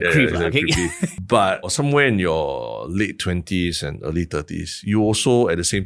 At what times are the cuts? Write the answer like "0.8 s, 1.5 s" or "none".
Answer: 1.1 s, 1.7 s